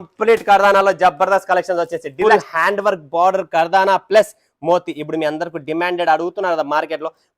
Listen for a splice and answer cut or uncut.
cut